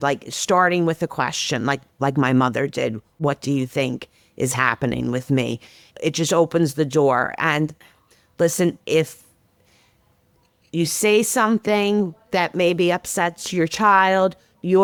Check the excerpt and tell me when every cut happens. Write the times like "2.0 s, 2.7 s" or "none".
none